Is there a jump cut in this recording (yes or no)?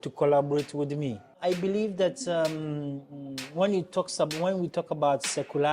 yes